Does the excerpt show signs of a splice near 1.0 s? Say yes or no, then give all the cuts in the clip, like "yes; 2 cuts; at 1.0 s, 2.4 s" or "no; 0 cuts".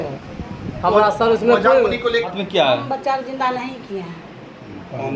no; 1 cut; at 2.3 s